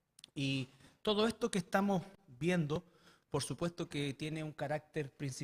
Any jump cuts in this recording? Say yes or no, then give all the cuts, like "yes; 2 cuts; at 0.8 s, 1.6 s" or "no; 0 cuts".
yes; 1 cut; at 1.5 s